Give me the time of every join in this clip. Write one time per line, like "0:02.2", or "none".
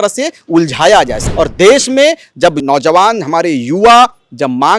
0:01.3
0:02.6